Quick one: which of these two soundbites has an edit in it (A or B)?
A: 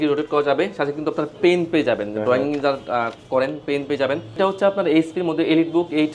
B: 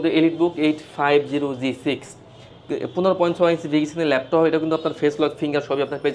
A